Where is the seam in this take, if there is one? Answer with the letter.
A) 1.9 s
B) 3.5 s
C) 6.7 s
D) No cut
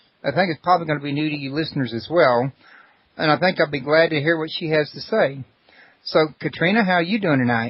C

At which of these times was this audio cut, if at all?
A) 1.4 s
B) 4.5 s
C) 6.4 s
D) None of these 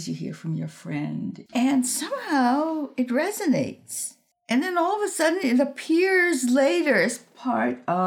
A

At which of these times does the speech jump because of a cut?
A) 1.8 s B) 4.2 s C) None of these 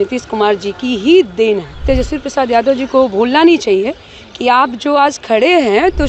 A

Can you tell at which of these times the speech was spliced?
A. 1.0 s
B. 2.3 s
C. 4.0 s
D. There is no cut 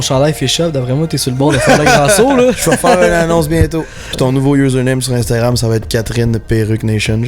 C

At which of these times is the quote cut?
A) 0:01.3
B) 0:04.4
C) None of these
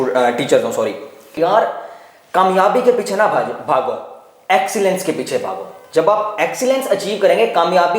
A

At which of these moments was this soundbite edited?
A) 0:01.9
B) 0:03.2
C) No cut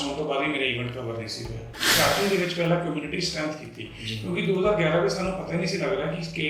A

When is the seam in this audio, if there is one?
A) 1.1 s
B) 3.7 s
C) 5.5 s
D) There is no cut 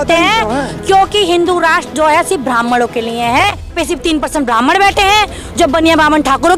B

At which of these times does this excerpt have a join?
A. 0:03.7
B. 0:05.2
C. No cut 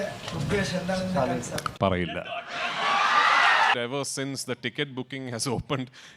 A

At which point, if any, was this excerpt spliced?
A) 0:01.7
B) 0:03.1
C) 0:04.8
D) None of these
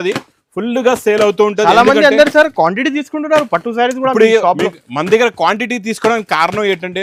D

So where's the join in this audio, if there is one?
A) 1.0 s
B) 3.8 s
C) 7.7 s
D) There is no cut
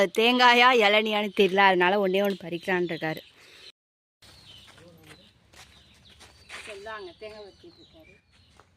B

